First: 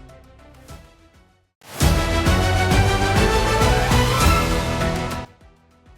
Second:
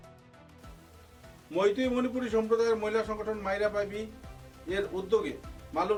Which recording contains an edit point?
first; 1 cut; at 1.4 s

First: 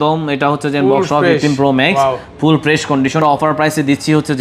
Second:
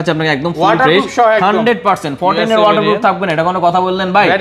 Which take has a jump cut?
first; 1 cut; at 3.2 s

